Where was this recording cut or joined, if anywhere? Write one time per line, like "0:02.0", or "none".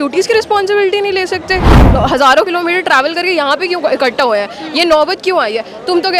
0:01.9